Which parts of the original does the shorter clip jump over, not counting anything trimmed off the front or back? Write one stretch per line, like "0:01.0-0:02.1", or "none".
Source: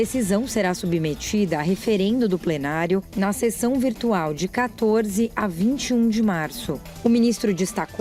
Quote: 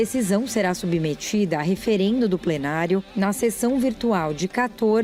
none